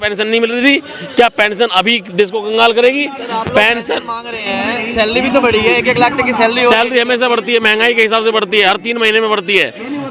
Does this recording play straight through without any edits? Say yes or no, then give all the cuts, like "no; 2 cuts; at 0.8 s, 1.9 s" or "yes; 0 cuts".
yes; 0 cuts